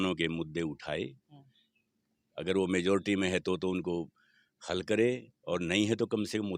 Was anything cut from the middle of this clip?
no; 0 cuts

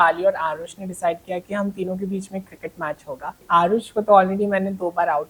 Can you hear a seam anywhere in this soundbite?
yes; 1 cut; at 3.4 s

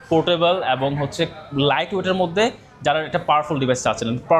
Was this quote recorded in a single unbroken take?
yes; 0 cuts

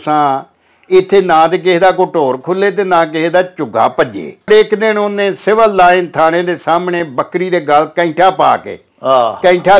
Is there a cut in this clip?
yes; 1 cut; at 4.5 s

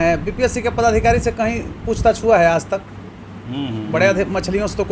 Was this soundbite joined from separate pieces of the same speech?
no; 0 cuts

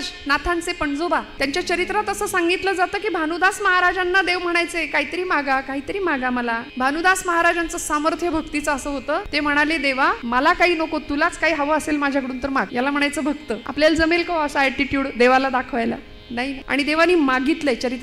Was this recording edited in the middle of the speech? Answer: yes; 7 cuts; at 1.3 s, 6.7 s, 9.3 s, 10.2 s, 12.7 s, 13.7 s, 16.6 s

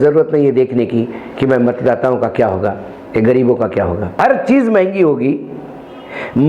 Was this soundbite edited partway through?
yes; 1 cut; at 4.2 s

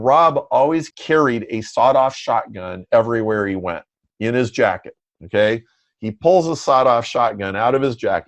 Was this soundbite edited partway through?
yes; 1 cut; at 0.9 s

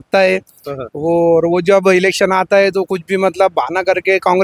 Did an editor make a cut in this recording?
no; 0 cuts

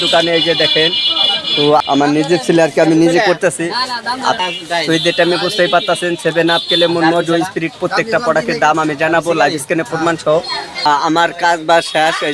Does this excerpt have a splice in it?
yes; 3 cuts; at 1.8 s, 4.4 s, 10.8 s

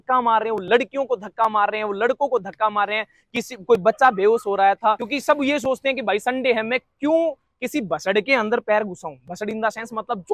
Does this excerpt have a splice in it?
yes; 1 cut; at 5.1 s

